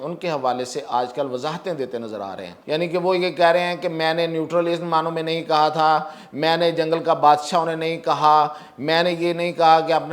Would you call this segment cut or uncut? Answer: cut